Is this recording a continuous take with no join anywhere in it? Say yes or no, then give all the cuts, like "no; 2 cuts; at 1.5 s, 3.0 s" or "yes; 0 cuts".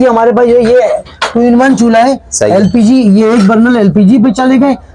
yes; 0 cuts